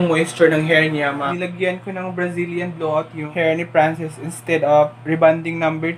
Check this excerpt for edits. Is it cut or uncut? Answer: cut